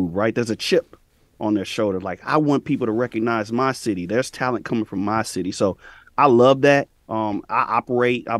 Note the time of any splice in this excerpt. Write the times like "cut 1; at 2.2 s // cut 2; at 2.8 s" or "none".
none